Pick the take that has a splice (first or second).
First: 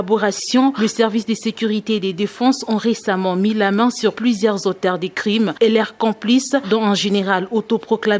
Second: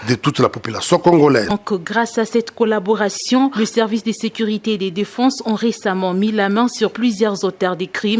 second